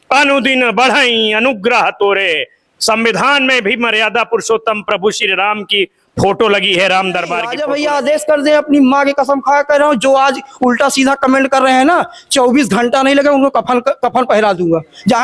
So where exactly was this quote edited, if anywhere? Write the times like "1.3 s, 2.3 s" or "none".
7.6 s